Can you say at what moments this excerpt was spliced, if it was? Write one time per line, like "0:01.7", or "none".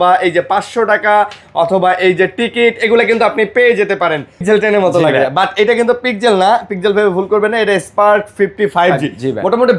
0:04.4